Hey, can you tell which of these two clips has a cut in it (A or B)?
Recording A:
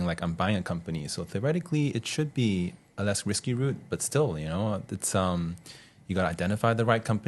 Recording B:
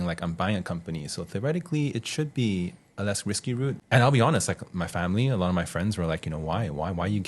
B